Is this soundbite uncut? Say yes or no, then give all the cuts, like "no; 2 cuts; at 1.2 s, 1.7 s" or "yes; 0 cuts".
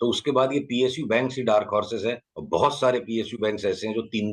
no; 1 cut; at 2.3 s